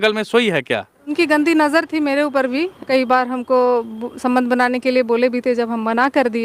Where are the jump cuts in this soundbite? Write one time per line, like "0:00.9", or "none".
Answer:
0:01.1
0:02.8